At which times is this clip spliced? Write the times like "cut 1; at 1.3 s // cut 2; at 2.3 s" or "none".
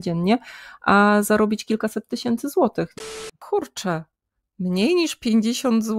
cut 1; at 2.9 s